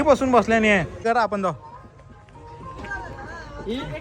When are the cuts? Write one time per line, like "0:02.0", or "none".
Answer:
0:01.0